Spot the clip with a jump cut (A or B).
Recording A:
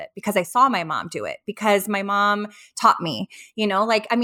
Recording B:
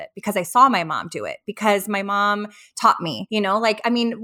B